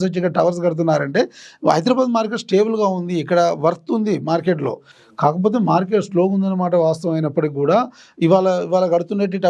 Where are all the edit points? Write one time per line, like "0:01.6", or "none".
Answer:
none